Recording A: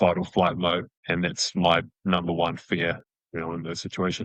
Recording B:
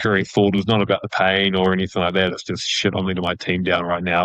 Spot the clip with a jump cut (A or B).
A